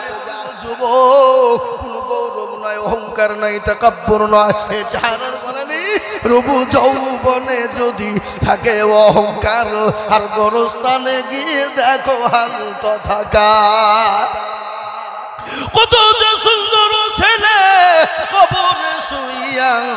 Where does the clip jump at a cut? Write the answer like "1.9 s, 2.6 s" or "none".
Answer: 5.7 s